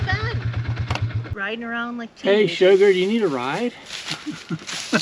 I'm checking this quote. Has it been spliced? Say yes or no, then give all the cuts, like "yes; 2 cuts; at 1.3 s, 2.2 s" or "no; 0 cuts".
yes; 1 cut; at 1.2 s